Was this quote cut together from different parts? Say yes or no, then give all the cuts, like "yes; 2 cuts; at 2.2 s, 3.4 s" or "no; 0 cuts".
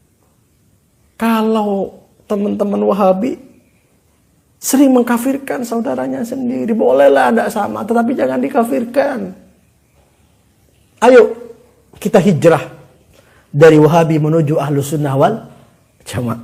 no; 0 cuts